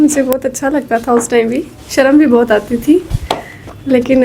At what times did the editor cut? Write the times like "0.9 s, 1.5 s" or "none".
none